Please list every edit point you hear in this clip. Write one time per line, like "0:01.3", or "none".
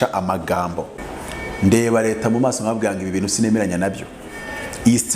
0:01.1